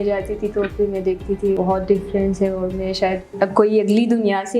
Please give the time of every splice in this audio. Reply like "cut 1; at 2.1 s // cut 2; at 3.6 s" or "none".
cut 1; at 1.6 s // cut 2; at 3.3 s